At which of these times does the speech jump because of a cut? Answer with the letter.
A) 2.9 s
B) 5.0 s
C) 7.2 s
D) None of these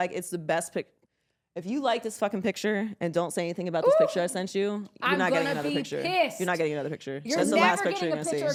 D